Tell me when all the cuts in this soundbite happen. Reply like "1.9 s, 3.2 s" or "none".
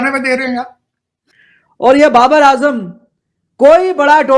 1.3 s